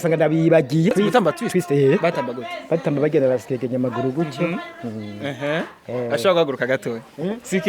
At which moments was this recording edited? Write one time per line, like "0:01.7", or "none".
0:00.9